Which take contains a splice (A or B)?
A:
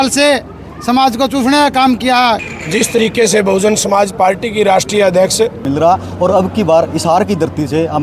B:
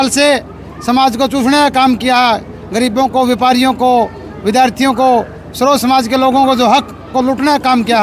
A